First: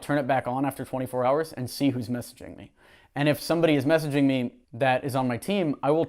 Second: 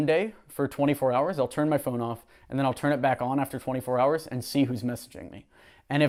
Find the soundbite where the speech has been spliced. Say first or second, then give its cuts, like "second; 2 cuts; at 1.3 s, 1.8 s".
first; 1 cut; at 4.6 s